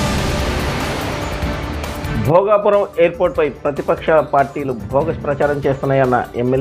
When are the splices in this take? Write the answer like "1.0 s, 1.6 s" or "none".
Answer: 2.1 s